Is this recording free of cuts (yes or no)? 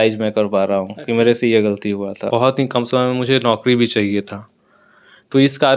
no